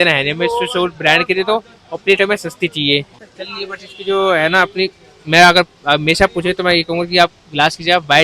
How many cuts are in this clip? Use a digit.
1